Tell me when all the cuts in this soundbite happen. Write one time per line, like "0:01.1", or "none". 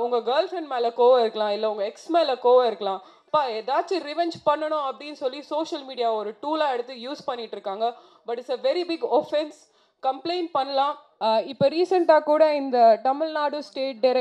0:11.1

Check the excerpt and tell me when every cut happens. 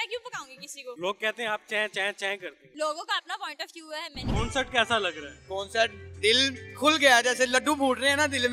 0:01.0
0:02.6
0:04.2

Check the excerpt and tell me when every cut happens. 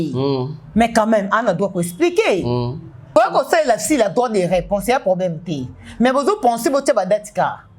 0:03.2

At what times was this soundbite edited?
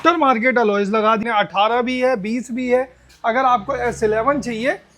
0:01.2

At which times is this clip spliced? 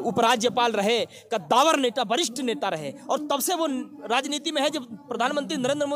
none

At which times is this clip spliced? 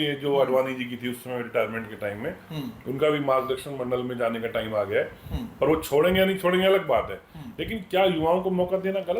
none

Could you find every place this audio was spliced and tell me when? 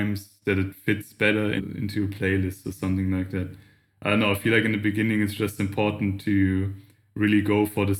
0:01.6

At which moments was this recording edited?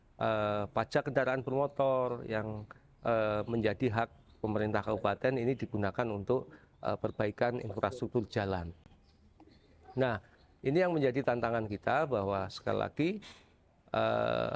none

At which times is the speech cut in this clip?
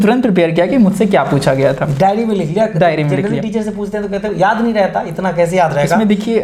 none

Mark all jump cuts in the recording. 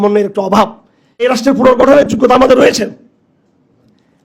0:01.2

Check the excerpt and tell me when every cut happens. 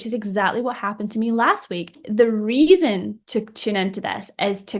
0:02.0

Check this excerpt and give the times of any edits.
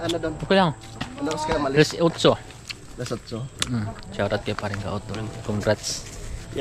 none

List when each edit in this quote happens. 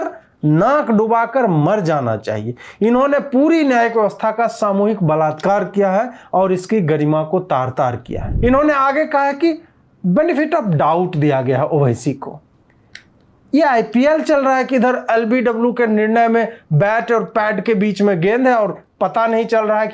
0:08.3

